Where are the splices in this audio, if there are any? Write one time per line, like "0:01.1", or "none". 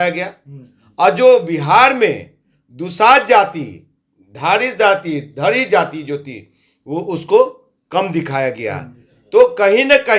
none